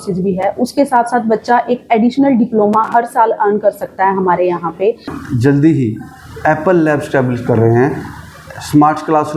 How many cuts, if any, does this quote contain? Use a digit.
1